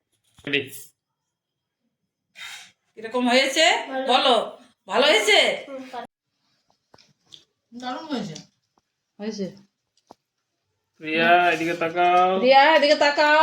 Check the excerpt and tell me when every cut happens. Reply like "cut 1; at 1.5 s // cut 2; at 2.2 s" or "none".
cut 1; at 6.0 s